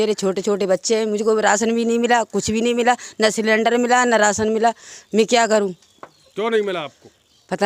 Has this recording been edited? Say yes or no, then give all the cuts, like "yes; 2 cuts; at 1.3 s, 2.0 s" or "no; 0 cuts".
no; 0 cuts